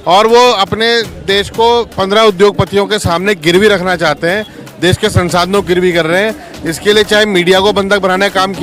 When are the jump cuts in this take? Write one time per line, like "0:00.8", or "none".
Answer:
none